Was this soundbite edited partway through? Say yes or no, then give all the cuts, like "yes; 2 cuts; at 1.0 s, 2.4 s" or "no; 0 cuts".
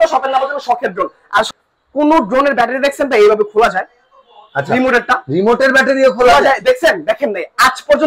yes; 1 cut; at 1.5 s